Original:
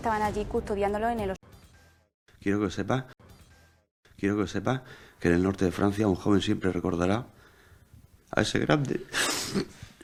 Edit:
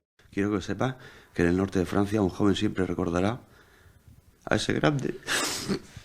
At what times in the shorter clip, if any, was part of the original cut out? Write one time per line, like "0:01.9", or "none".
0:01.0

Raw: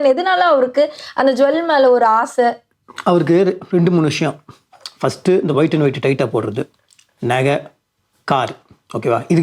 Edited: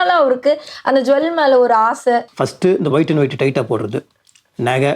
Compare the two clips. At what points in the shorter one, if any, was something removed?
0:02.4

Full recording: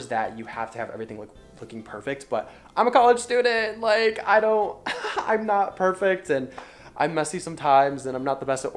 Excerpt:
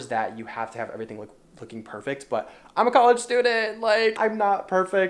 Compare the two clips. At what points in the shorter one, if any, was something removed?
0:04.2

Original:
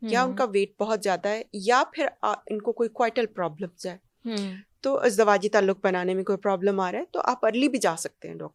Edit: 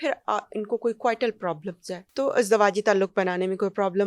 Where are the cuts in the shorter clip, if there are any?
0:02.0

